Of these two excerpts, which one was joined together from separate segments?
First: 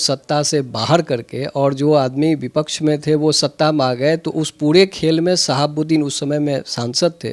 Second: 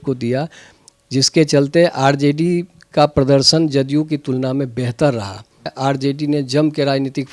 second; 1 cut; at 5.7 s

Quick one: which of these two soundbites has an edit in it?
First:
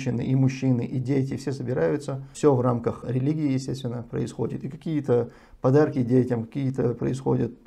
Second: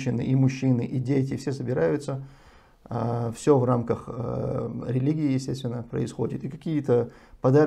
first; 2 cuts; at 2.3 s, 3.0 s

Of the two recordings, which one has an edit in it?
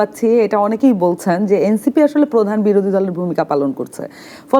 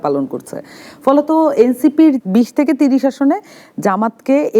second; 1 cut; at 2.2 s

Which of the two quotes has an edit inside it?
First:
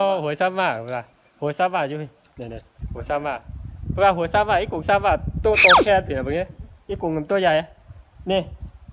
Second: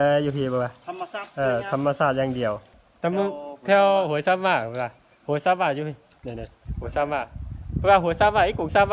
second; 1 cut; at 2.8 s

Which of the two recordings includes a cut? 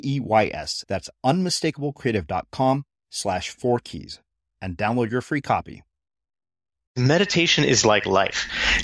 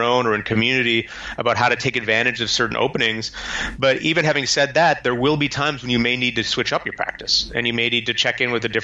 first; 1 cut; at 6.9 s

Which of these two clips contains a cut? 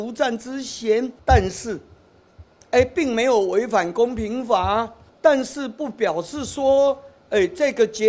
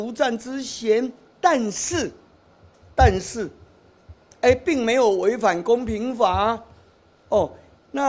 first; 2 cuts; at 1.2 s, 5.0 s

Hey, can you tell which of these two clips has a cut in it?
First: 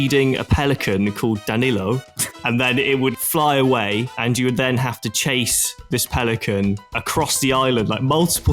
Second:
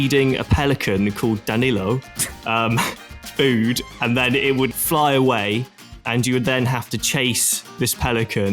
first; 2 cuts; at 2.3 s, 4.1 s

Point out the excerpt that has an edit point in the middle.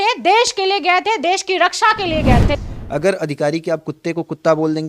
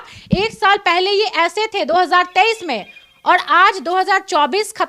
first; 1 cut; at 2.4 s

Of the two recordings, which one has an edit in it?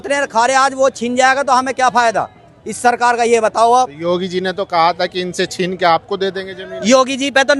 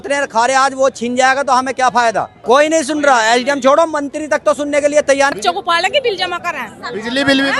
second; 2 cuts; at 2.3 s, 5.3 s

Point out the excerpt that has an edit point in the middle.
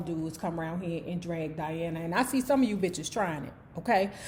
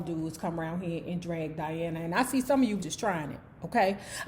second; 1 cut; at 2.8 s

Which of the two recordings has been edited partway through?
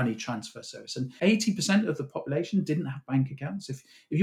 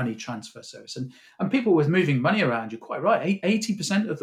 first; 1 cut; at 1.2 s

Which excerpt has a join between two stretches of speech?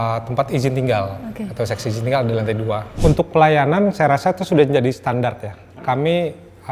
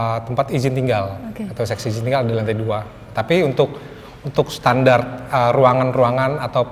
first; 2 cuts; at 2.9 s, 5.8 s

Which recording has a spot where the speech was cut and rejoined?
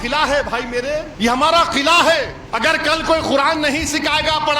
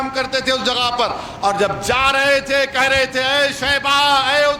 first; 2 cuts; at 1.1 s, 2.4 s

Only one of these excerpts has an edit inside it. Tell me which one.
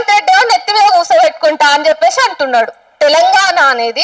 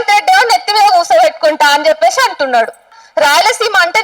second; 1 cut; at 2.9 s

